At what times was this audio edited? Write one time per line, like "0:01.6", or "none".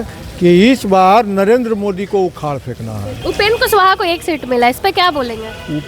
0:03.1